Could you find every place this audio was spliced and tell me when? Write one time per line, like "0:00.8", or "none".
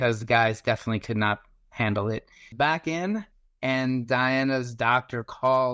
0:02.5